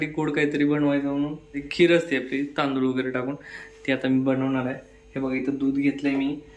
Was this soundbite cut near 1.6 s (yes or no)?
yes